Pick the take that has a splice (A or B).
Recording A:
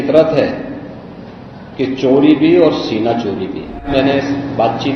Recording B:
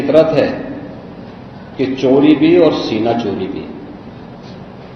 A